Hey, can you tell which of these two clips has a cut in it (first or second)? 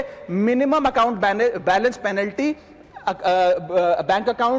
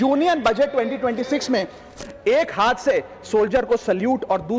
second